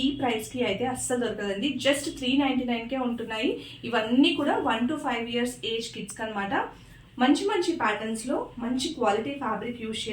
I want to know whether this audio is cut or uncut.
uncut